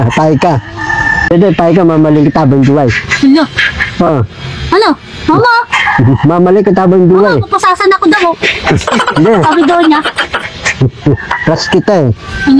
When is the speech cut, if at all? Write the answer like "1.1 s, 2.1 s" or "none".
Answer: 1.3 s